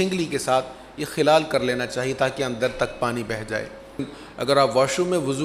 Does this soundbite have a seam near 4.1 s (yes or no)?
yes